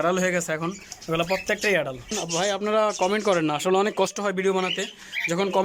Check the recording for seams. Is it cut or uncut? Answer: cut